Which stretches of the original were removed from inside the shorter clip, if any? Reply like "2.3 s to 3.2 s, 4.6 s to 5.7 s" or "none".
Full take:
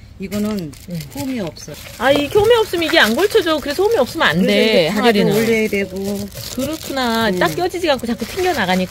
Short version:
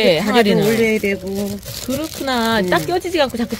none

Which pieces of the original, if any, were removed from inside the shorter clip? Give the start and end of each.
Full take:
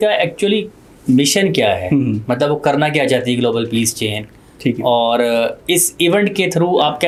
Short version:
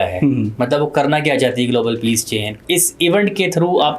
4.3 s to 5.6 s

